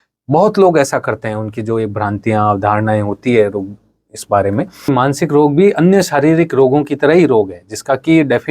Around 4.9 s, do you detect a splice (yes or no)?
yes